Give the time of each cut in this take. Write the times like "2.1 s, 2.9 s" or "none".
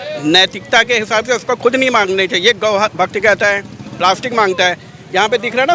none